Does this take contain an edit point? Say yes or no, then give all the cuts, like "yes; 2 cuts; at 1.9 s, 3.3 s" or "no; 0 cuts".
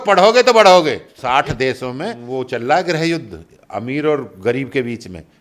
yes; 2 cuts; at 1.1 s, 2.2 s